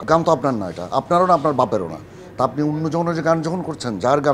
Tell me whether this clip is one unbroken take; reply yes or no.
yes